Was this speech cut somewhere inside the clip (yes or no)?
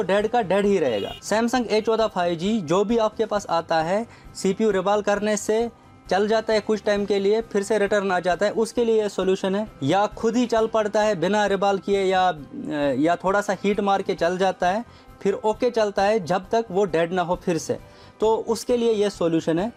no